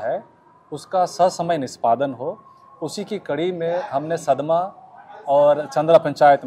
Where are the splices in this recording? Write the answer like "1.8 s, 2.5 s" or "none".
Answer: none